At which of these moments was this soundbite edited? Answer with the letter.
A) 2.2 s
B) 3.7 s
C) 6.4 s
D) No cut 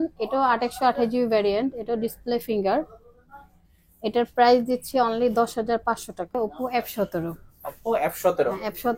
C